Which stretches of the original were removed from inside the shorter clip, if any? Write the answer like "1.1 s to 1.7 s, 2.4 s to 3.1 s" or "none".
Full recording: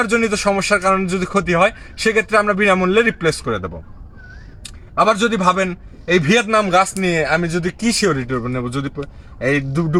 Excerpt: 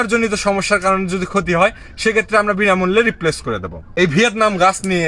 3.8 s to 5.9 s